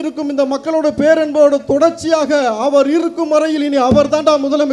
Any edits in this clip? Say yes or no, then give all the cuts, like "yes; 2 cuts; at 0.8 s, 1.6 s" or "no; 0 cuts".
no; 0 cuts